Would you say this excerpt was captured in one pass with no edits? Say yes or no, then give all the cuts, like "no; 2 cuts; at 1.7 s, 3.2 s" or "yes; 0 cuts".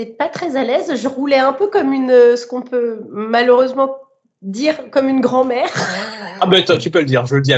yes; 0 cuts